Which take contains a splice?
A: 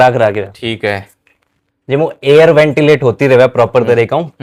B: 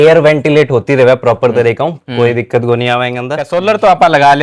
B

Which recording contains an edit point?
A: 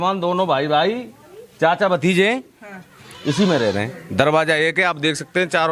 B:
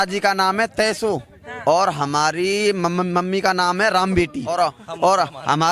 B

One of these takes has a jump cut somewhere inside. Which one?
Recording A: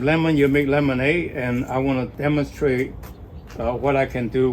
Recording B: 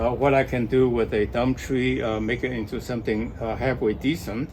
A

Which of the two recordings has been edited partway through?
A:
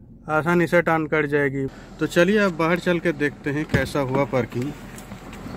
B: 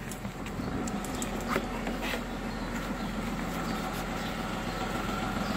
A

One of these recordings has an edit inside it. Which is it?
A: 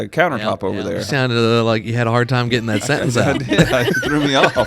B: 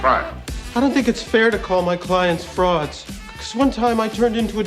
A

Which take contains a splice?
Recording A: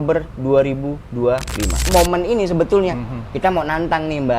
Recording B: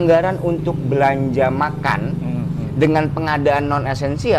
A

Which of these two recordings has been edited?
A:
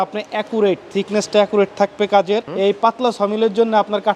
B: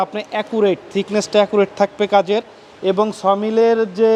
A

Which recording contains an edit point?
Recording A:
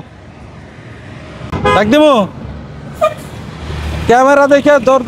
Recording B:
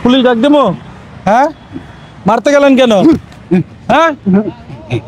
A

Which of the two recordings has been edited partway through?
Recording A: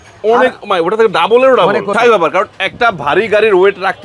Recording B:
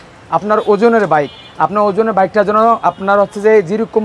A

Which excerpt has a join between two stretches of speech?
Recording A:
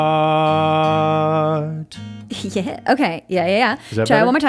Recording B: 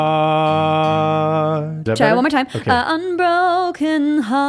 B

